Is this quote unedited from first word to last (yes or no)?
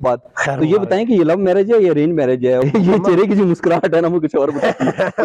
no